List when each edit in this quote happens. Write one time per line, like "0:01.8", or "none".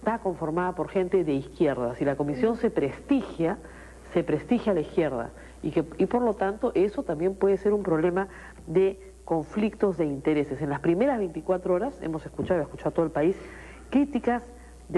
none